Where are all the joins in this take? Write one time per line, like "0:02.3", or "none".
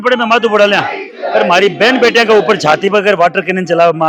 none